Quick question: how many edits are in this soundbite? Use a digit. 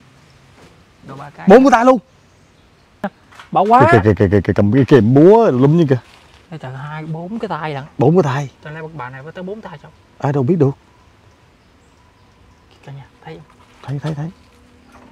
1